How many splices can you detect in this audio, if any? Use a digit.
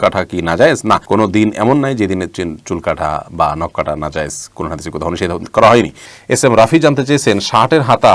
0